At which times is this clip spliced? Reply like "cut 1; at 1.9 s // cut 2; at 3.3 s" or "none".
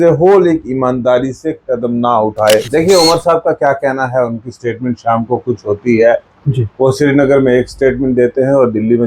cut 1; at 2.7 s

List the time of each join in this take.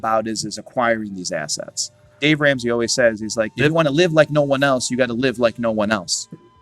cut 1; at 2.2 s // cut 2; at 3.5 s

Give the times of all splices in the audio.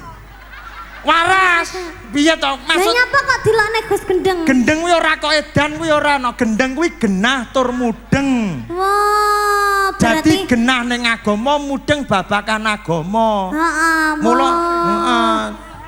none

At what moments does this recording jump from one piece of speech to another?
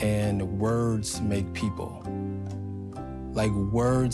none

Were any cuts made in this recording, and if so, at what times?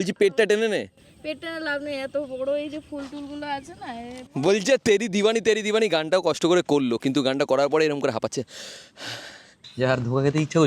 cut 1; at 4.3 s // cut 2; at 9.6 s

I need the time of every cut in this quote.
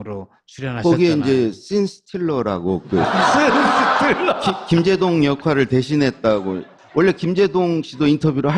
cut 1; at 4.0 s

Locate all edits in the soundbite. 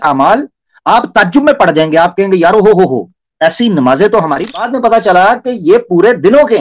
cut 1; at 4.5 s

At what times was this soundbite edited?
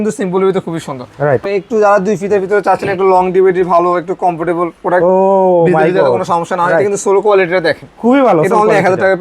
cut 1; at 1.4 s

